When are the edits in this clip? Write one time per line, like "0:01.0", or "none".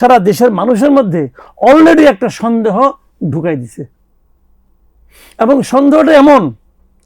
none